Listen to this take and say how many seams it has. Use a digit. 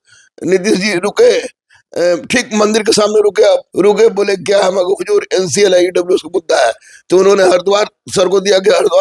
1